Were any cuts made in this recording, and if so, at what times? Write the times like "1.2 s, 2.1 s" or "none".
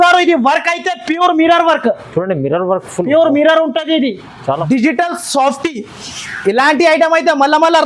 4.6 s

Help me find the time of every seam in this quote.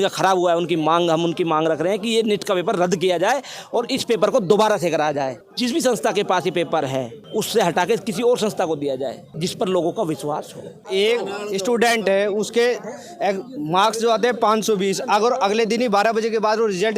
5.4 s, 7.2 s, 9.2 s, 10.9 s

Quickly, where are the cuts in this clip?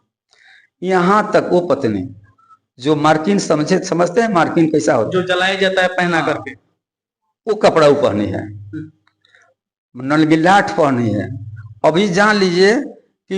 none

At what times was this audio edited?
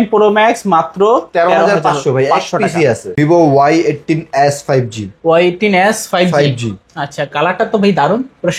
3.1 s

